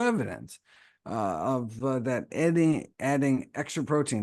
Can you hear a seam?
no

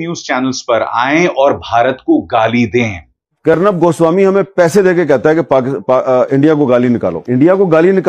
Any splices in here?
yes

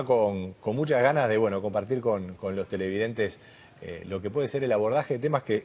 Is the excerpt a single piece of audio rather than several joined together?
no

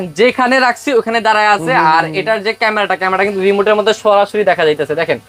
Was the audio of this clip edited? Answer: no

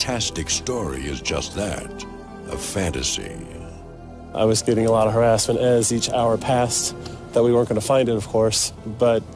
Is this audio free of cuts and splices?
no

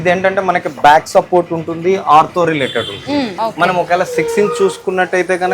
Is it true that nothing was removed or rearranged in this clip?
no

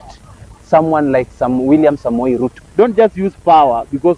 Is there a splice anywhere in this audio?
yes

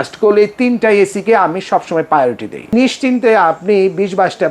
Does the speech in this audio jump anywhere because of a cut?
yes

